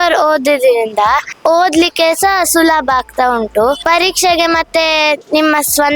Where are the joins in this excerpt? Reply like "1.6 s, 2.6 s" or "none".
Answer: 1.3 s, 3.8 s